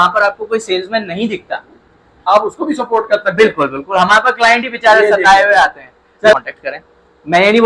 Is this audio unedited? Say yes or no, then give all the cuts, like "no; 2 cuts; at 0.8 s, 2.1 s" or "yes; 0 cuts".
no; 2 cuts; at 2.2 s, 6.3 s